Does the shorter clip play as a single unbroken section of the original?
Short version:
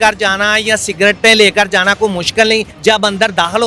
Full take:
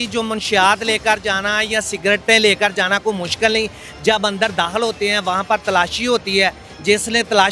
no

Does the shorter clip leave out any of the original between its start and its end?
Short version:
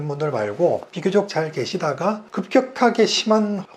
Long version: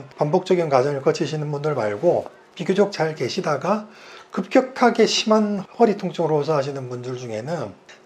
yes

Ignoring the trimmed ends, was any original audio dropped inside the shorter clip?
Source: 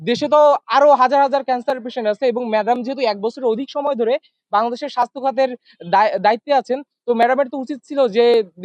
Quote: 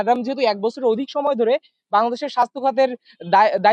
no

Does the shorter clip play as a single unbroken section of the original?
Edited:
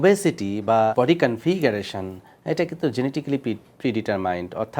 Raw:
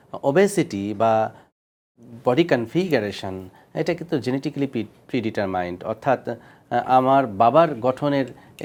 no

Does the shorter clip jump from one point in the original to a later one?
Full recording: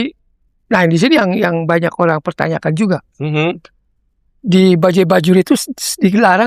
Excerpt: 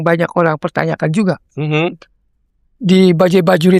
no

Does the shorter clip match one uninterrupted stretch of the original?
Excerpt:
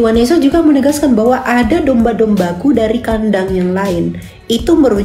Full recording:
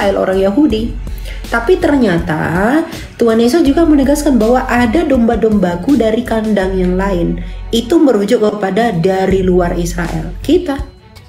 yes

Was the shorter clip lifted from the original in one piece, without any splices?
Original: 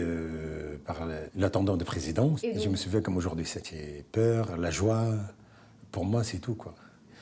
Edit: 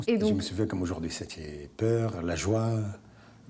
yes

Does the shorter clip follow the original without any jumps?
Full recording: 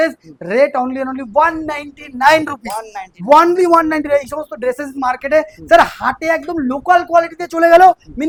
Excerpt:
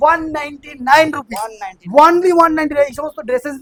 yes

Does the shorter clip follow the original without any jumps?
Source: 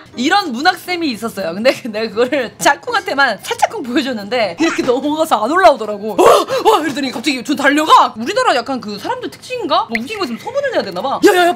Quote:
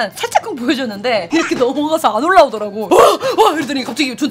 yes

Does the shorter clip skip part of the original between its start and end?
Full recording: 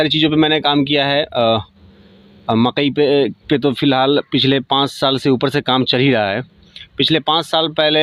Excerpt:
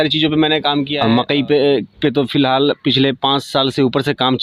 yes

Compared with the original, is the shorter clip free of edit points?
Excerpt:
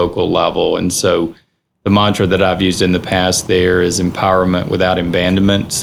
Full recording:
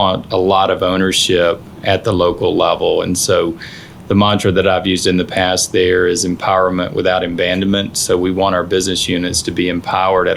yes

